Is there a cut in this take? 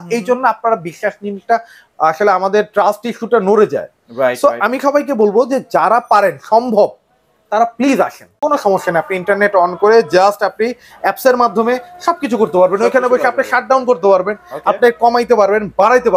yes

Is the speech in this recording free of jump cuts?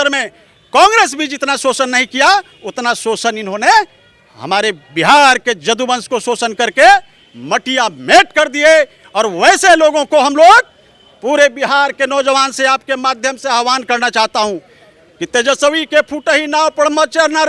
yes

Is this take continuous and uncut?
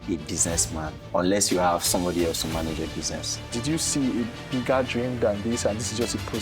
no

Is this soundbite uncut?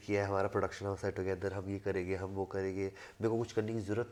yes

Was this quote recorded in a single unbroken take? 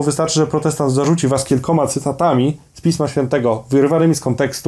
yes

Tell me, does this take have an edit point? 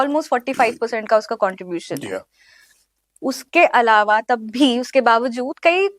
no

